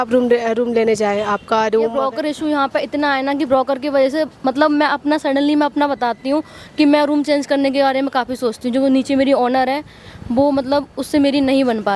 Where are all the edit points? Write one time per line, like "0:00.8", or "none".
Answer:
0:02.0